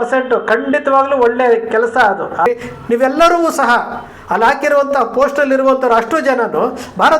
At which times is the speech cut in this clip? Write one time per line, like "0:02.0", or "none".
0:02.5